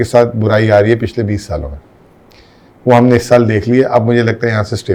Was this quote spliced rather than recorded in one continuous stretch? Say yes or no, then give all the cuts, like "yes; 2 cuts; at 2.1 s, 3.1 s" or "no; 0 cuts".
no; 0 cuts